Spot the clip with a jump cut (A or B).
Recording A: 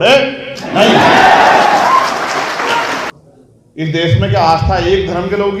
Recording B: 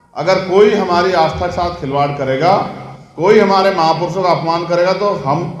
A